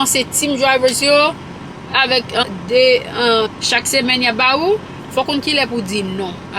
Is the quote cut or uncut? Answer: cut